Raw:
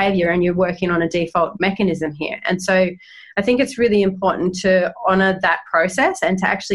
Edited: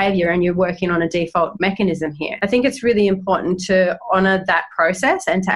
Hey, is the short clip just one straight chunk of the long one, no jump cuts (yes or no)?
no